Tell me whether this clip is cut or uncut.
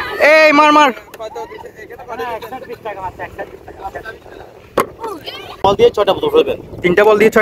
cut